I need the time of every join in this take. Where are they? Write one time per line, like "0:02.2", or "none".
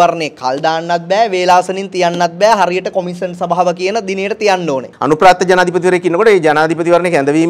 0:04.9